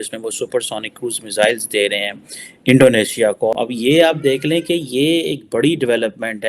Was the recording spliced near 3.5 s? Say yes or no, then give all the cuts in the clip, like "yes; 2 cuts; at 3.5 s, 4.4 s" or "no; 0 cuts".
yes; 1 cut; at 3.5 s